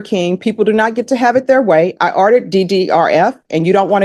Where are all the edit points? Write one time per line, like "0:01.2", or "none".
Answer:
none